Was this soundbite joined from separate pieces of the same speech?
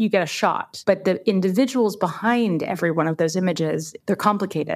no; 0 cuts

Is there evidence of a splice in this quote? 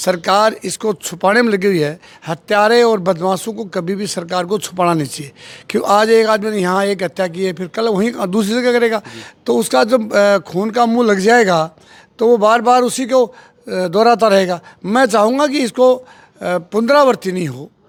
no; 0 cuts

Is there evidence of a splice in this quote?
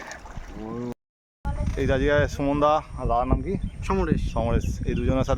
yes; 1 cut; at 0.9 s

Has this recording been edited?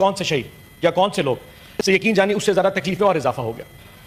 no; 0 cuts

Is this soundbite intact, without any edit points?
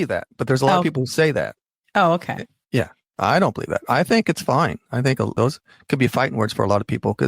no; 1 cut; at 5.3 s

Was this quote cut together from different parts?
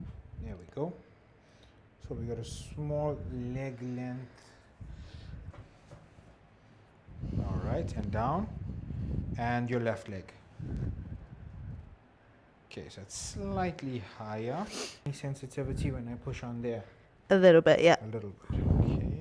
yes; 2 cuts; at 5.5 s, 15.0 s

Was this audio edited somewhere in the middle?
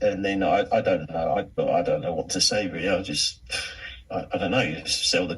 yes; 1 cut; at 1.5 s

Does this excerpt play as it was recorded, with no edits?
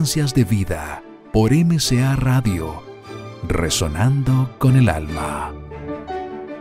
no; 1 cut; at 5.7 s

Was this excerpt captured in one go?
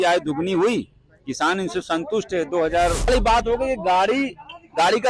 no; 1 cut; at 3.1 s

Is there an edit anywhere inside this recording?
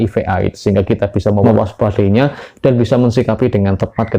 yes; 1 cut; at 1.4 s

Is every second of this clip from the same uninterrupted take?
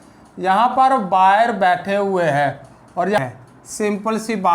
no; 1 cut; at 3.2 s

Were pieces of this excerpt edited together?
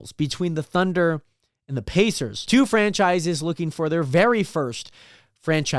yes; 1 cut; at 2.3 s

